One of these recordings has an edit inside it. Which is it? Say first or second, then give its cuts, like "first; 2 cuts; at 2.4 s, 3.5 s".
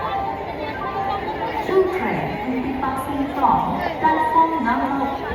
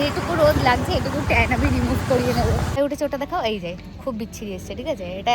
second; 1 cut; at 2.8 s